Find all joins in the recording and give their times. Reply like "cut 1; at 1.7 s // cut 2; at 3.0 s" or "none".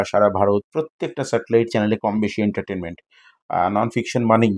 none

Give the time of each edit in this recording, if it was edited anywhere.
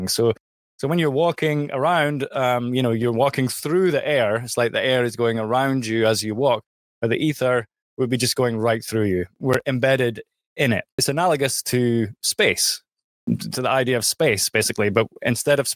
cut 1; at 9.4 s // cut 2; at 10.9 s

